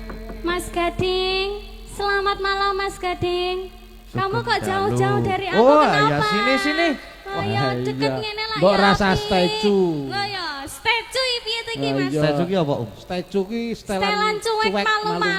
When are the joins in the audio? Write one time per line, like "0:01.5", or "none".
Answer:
none